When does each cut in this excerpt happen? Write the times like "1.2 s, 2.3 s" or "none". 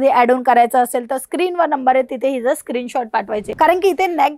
3.5 s